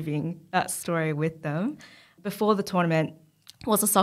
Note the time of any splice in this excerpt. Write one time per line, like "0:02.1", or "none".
0:02.1